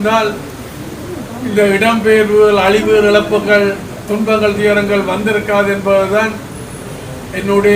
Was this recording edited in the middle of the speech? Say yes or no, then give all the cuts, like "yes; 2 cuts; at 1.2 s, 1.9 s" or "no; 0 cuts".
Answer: no; 0 cuts